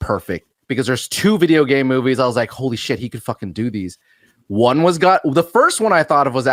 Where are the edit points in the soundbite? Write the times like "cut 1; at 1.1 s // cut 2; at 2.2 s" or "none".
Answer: none